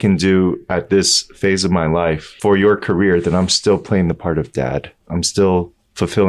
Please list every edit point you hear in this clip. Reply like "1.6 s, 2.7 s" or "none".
2.3 s, 5.0 s